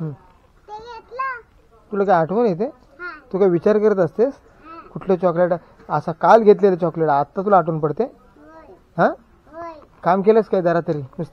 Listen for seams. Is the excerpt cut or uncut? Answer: uncut